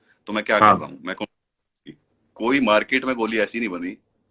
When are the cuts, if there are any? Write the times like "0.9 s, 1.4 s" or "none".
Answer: 1.9 s